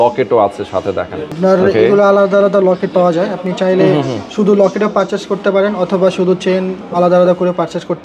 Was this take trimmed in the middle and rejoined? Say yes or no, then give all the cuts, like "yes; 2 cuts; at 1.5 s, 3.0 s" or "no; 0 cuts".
no; 0 cuts